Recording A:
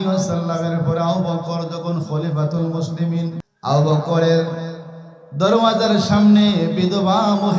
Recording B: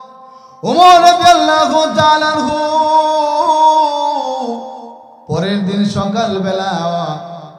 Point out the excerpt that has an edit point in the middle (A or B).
A